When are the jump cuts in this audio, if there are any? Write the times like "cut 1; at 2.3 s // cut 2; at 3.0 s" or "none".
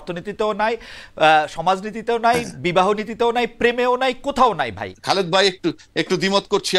cut 1; at 4.9 s